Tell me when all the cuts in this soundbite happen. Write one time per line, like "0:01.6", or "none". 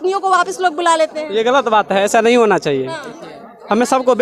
none